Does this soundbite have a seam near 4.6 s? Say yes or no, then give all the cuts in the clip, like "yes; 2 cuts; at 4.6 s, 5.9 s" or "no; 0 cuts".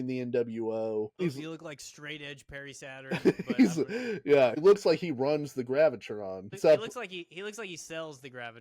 yes; 3 cuts; at 1.1 s, 4.6 s, 6.5 s